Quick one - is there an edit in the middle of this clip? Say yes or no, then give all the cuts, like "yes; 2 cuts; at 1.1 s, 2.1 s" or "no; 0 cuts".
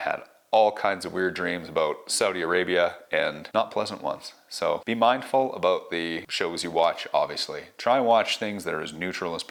no; 0 cuts